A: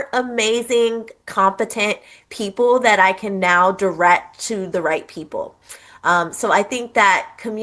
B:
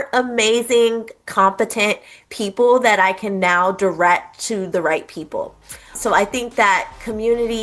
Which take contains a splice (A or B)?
B